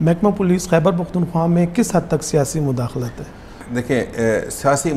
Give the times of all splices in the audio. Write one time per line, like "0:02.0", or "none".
none